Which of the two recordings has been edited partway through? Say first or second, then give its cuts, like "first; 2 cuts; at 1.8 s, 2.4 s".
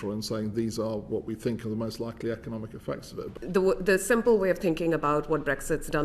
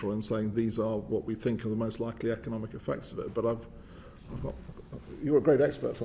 first; 1 cut; at 3.2 s